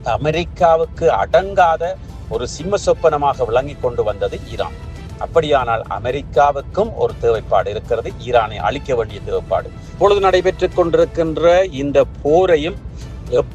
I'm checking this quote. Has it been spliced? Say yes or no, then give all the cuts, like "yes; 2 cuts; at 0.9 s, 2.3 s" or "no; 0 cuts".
yes; 1 cut; at 9.9 s